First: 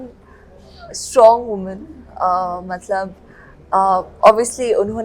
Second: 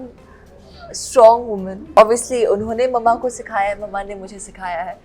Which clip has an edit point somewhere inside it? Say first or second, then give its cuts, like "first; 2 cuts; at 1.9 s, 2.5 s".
second; 1 cut; at 1.8 s